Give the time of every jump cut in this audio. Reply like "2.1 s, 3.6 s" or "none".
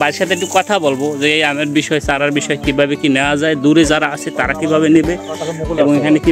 none